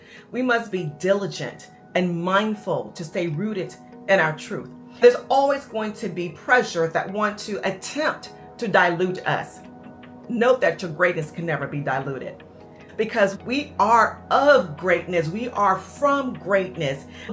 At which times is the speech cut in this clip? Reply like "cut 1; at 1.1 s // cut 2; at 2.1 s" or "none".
cut 1; at 5.0 s // cut 2; at 13.0 s